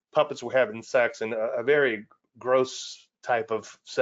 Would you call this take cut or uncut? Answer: uncut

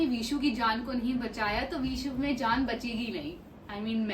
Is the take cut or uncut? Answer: uncut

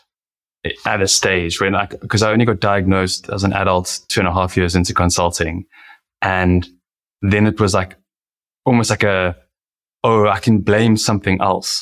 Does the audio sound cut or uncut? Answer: cut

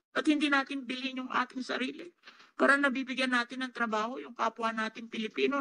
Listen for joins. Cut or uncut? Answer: uncut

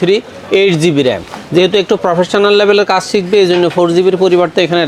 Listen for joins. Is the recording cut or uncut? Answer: uncut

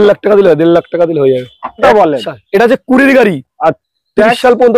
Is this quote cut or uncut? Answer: cut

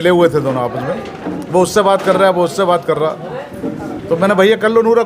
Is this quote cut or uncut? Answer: uncut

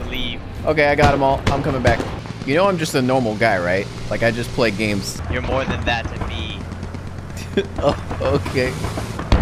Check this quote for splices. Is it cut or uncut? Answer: cut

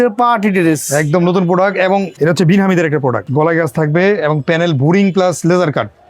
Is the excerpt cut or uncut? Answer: cut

